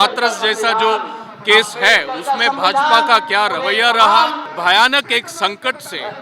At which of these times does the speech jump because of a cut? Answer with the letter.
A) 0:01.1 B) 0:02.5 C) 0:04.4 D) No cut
C